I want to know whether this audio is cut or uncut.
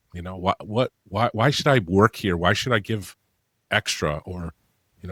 uncut